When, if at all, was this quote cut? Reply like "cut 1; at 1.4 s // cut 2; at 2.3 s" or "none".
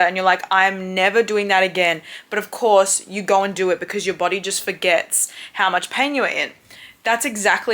none